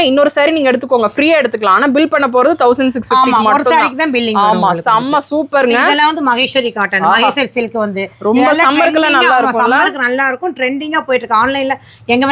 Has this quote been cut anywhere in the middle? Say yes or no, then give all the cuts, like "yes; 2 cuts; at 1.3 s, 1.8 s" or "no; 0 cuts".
no; 0 cuts